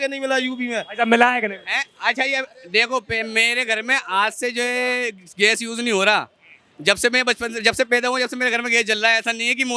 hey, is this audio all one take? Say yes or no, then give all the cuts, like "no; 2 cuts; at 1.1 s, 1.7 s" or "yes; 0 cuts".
yes; 0 cuts